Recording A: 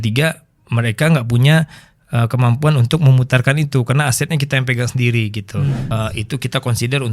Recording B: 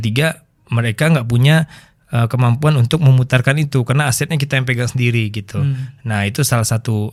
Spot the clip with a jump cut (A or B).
A